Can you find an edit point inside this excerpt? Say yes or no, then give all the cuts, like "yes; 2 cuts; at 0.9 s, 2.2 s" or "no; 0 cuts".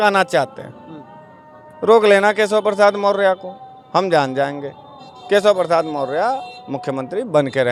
no; 0 cuts